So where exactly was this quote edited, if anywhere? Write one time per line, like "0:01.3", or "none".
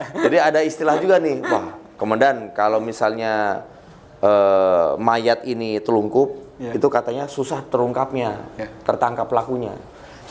none